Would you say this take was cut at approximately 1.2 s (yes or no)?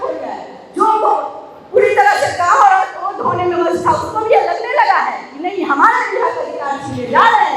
no